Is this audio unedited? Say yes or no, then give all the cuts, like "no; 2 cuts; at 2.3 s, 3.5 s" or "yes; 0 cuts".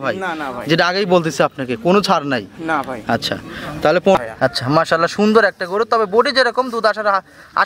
no; 1 cut; at 4.1 s